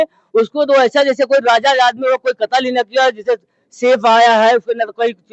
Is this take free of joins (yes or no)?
yes